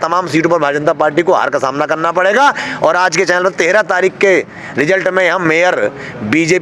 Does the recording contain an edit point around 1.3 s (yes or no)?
no